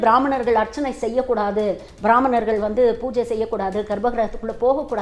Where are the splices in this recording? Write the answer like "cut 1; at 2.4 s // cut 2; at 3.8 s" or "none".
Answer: none